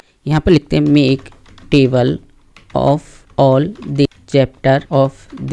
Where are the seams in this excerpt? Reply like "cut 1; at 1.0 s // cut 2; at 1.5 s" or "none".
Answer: none

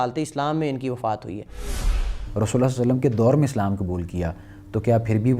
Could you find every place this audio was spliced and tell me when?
cut 1; at 2.0 s

